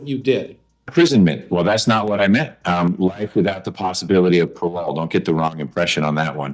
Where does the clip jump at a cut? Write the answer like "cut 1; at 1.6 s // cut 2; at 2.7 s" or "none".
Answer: cut 1; at 0.9 s